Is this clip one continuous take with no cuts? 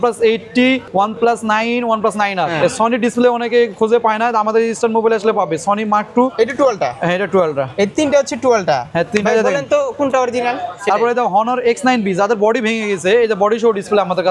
no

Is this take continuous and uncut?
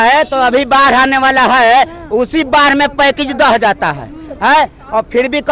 yes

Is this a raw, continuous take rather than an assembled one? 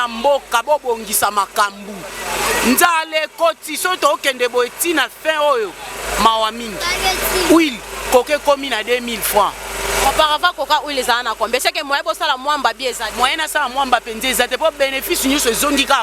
yes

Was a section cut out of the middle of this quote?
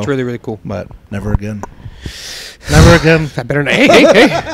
no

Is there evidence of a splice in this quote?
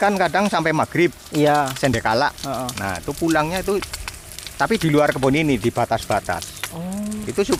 no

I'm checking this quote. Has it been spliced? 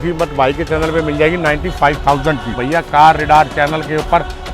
yes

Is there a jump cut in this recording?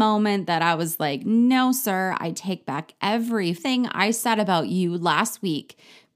yes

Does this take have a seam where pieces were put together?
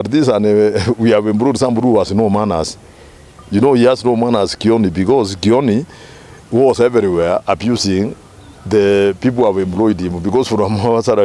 no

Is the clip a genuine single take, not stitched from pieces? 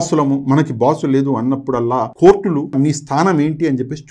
no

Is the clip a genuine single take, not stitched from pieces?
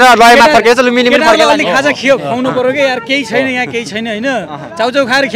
yes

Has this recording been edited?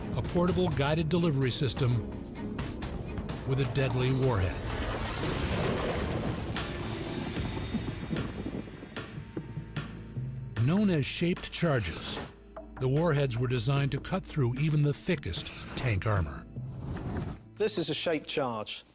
yes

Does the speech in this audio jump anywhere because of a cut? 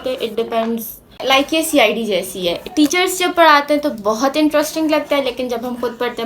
yes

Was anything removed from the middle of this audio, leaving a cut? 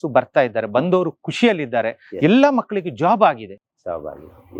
no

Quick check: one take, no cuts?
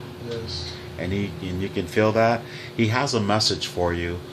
no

